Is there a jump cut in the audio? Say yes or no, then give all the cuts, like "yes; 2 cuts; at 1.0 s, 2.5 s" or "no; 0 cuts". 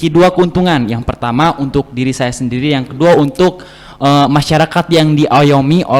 no; 0 cuts